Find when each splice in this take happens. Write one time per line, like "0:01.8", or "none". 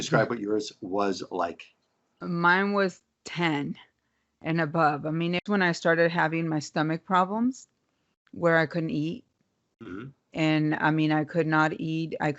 0:05.4

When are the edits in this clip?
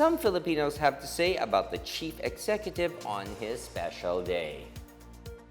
0:04.6

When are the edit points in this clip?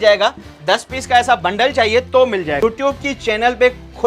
0:02.6

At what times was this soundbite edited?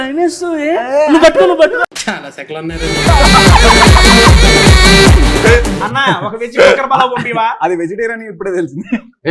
0:02.0
0:05.8

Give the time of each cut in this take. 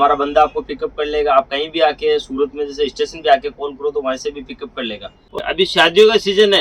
0:05.4

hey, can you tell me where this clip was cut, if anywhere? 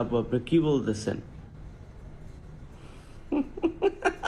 none

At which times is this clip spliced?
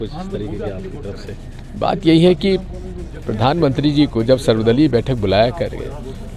none

